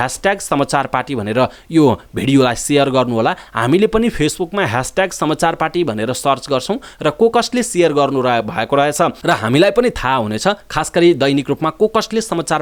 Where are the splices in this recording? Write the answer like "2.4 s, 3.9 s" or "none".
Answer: none